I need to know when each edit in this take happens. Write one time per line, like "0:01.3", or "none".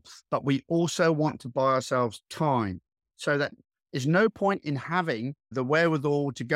0:05.5